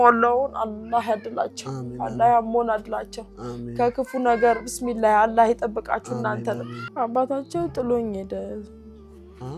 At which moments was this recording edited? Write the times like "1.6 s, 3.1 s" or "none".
6.8 s

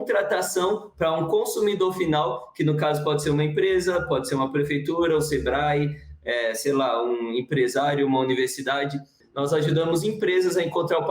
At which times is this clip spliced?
9.2 s

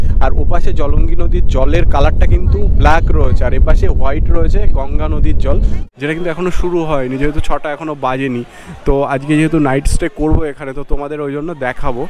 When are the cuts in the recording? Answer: 5.8 s

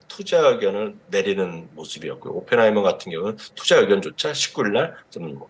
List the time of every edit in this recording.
none

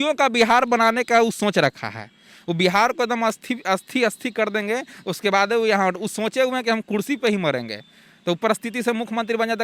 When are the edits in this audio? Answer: none

